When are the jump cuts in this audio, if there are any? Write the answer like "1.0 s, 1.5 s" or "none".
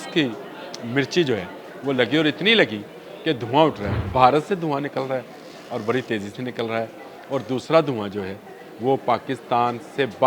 3.9 s